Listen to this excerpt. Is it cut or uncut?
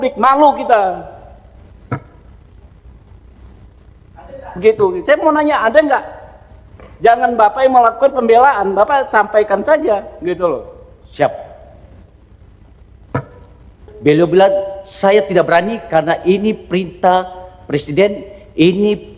cut